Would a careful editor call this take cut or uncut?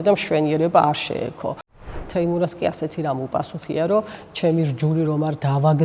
cut